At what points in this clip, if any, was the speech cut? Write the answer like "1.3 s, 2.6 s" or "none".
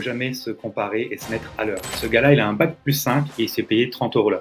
2.0 s

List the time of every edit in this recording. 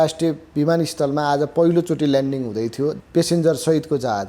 3.0 s

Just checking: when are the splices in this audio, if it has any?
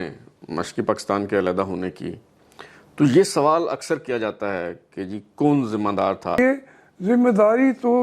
6.4 s

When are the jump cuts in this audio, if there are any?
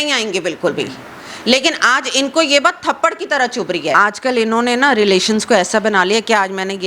3.9 s

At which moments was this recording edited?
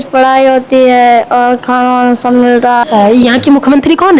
2.8 s

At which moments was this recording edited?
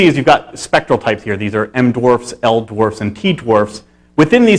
1.6 s

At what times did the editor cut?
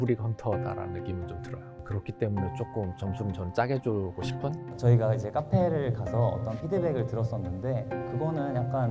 1.8 s, 4.7 s

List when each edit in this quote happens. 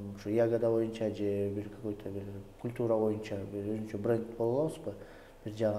none

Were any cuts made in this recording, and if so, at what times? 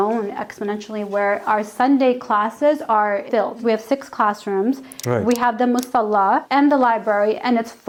none

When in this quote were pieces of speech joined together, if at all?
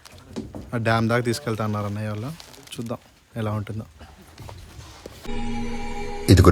5.3 s

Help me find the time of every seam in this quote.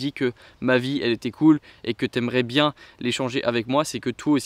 none

